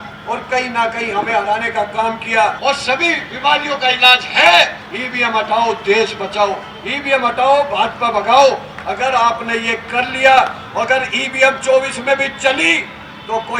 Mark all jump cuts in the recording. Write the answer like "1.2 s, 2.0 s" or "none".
2.6 s, 4.9 s

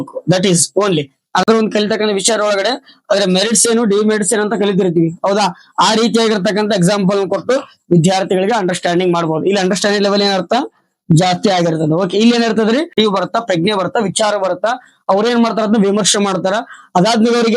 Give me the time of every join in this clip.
1.4 s, 12.9 s

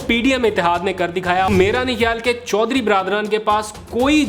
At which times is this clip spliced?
1.5 s

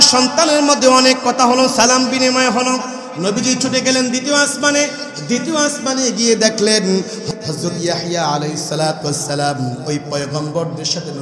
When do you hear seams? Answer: 7.2 s

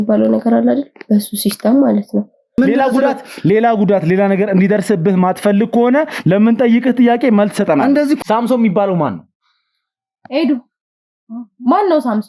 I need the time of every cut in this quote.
2.6 s, 8.2 s

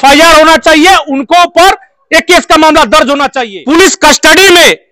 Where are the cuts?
3.4 s

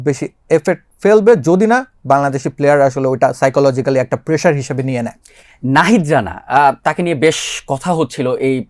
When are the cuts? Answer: none

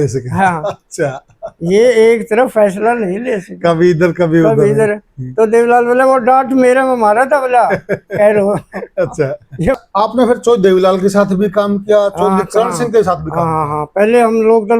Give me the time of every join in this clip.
9.7 s

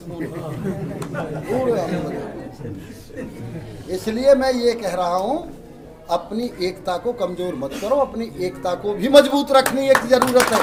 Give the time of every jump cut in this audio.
none

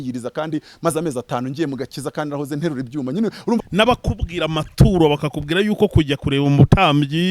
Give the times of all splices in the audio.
3.6 s

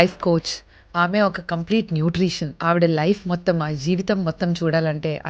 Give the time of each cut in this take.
2.6 s

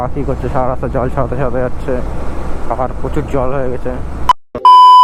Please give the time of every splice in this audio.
none

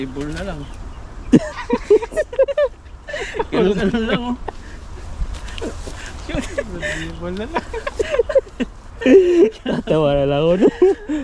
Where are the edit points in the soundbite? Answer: none

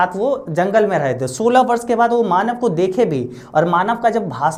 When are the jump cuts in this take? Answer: none

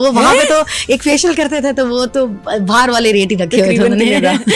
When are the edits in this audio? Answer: none

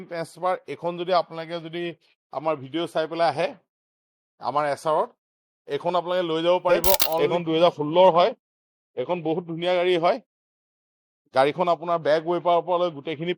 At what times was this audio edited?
7.2 s

